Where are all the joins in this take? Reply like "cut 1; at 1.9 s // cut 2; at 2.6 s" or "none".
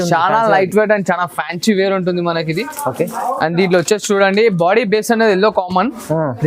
none